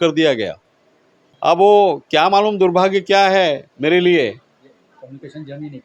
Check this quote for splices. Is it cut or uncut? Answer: cut